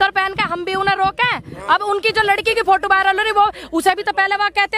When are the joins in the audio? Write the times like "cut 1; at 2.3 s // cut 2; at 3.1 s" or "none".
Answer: none